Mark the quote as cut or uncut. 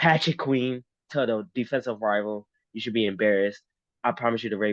uncut